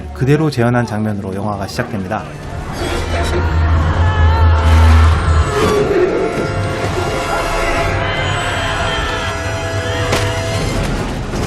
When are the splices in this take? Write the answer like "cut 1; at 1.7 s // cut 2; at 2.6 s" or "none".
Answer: cut 1; at 8.2 s